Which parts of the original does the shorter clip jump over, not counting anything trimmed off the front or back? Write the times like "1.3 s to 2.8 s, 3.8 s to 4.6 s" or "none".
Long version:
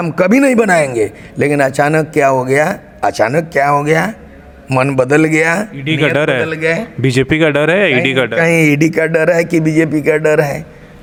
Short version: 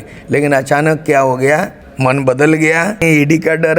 2.8 s to 4.5 s, 5.7 s to 8.5 s

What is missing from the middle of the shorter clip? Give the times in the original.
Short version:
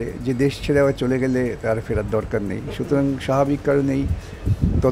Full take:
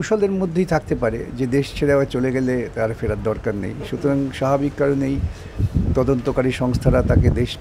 none

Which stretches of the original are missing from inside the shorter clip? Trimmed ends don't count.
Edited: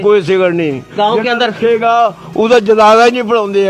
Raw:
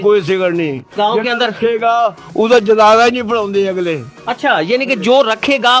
none

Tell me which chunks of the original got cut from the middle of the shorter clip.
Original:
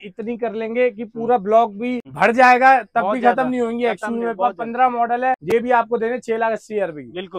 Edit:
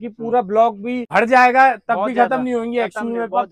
2.0 s to 2.1 s

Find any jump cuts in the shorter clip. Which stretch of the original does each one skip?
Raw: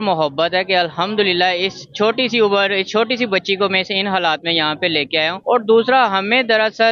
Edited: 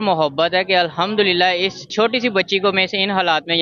1.9 s to 2.8 s

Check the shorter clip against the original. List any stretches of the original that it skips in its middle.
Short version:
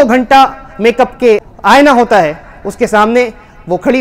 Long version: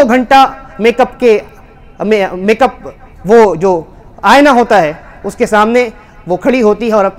1.5 s to 4.1 s

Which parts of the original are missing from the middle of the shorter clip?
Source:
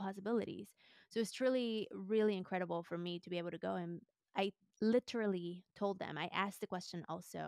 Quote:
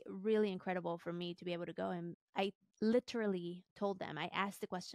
4.0 s to 4.2 s

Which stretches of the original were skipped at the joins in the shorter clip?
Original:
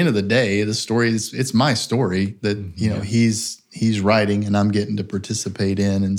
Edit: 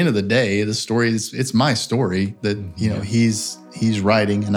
none

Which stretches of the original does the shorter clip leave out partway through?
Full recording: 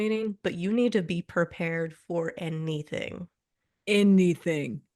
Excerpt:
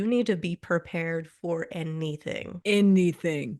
3.2 s to 3.7 s

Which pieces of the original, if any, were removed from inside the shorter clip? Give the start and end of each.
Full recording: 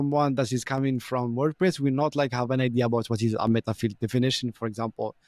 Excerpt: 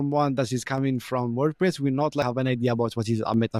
2.2 s to 2.4 s

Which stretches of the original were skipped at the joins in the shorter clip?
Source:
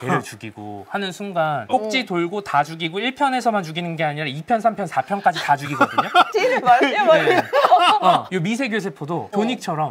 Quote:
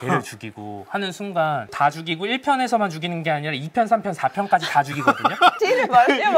1.7 s to 2.4 s

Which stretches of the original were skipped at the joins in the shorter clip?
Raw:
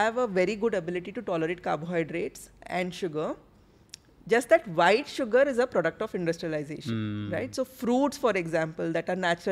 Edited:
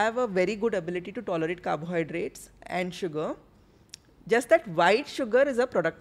none

